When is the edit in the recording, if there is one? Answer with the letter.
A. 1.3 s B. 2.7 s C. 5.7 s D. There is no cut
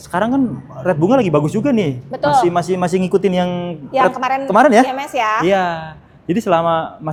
D